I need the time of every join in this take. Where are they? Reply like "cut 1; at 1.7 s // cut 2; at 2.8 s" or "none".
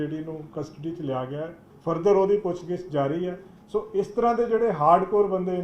cut 1; at 1.7 s